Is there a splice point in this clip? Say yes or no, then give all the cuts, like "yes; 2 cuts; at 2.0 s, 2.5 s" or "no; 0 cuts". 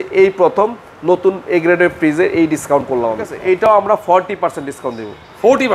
yes; 1 cut; at 3.3 s